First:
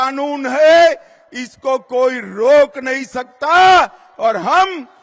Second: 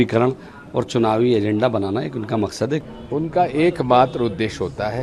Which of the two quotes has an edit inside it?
second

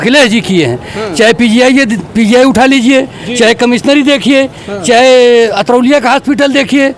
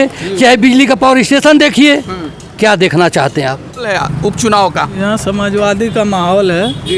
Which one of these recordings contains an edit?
second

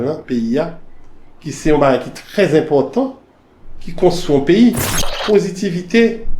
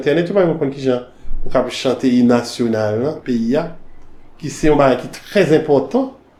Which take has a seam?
first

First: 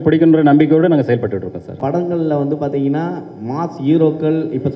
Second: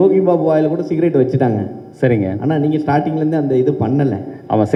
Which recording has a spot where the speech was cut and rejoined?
first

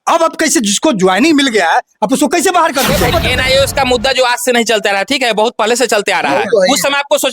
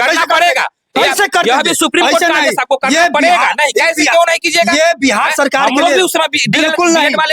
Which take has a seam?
first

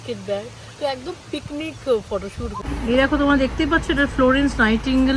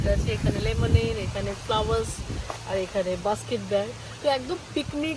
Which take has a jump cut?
first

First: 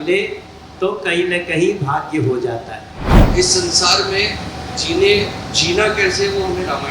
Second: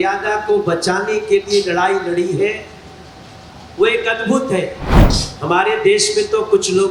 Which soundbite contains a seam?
first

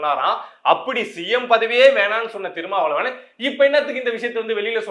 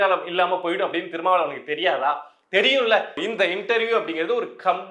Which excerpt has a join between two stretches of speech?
second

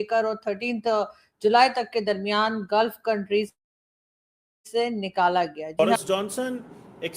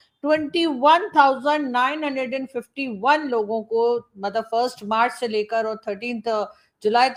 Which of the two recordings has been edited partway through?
first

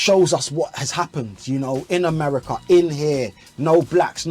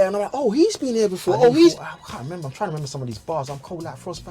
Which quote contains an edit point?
second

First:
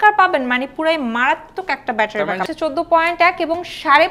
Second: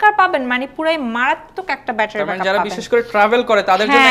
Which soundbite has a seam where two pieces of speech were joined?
first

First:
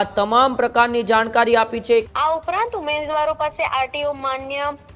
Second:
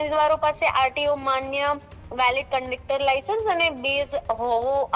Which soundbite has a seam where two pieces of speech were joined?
first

